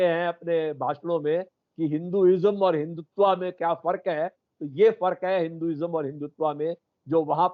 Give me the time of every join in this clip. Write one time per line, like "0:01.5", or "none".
none